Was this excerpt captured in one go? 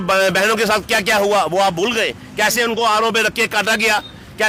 yes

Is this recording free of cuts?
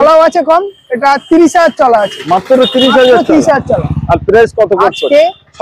yes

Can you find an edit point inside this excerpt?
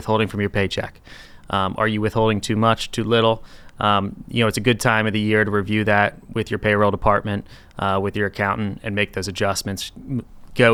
no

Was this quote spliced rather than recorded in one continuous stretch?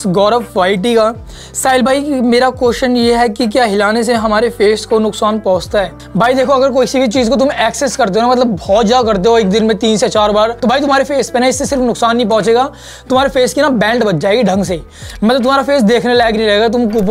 no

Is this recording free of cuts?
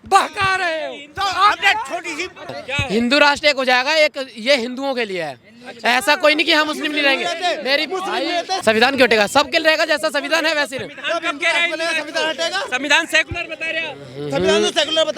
no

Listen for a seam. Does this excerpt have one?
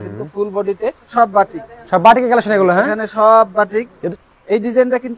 yes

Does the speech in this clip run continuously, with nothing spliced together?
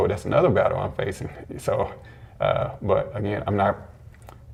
yes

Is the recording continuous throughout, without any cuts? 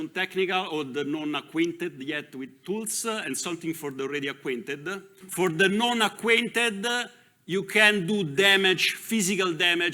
no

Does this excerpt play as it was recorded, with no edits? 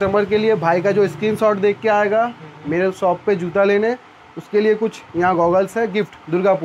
yes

